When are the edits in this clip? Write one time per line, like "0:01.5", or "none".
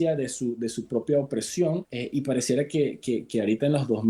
0:01.9